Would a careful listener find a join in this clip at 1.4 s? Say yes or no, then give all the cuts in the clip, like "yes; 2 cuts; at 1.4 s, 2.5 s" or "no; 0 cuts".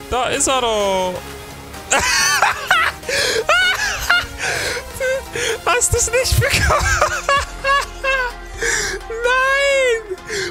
yes; 1 cut; at 1.4 s